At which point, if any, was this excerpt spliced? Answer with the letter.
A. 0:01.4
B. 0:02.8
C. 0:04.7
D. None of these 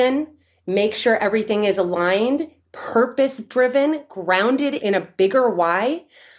C